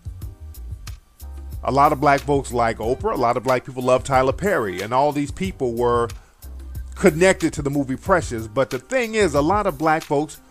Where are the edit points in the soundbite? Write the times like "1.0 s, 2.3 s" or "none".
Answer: 3.4 s